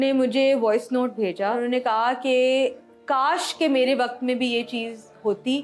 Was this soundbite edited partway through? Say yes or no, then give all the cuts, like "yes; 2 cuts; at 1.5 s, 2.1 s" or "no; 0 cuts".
yes; 1 cut; at 1.6 s